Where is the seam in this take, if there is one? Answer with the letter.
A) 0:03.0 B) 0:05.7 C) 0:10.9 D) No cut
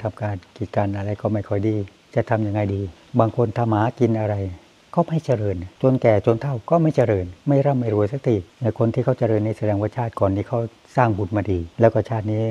A